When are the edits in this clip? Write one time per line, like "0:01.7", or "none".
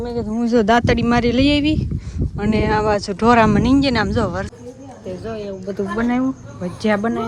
0:04.5

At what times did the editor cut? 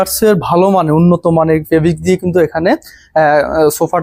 none

